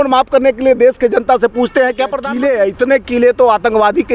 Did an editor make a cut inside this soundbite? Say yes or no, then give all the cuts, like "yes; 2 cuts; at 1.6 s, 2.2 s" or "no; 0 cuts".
yes; 1 cut; at 2.2 s